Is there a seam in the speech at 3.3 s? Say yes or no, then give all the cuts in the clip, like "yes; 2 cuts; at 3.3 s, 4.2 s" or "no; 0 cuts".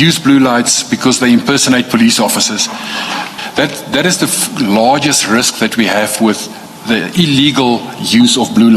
yes; 1 cut; at 3.3 s